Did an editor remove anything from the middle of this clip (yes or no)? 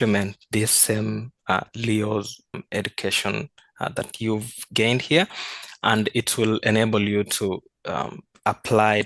yes